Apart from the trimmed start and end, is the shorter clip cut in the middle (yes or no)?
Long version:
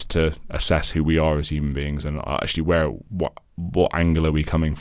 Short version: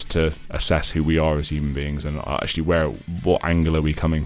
yes